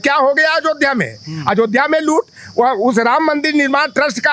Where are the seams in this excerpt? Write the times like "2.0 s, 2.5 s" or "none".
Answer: none